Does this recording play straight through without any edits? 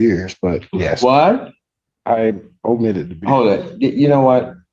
yes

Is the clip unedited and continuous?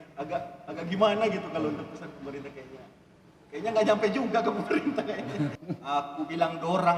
no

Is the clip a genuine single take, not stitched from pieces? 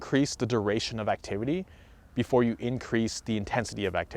yes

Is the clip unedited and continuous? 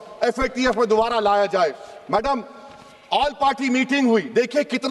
yes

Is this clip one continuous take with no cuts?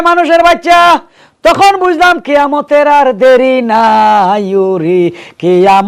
yes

